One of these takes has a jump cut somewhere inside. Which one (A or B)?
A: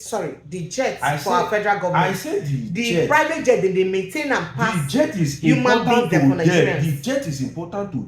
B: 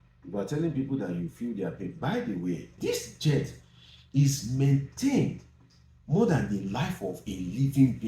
B